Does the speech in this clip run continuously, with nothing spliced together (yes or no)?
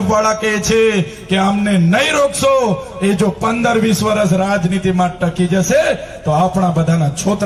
yes